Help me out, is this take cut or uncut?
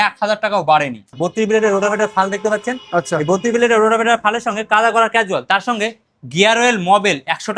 cut